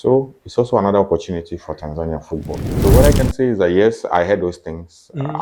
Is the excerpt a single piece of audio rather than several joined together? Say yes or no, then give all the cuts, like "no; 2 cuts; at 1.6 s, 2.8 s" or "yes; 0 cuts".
no; 1 cut; at 2.6 s